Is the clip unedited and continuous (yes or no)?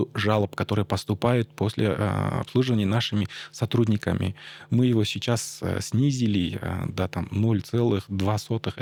yes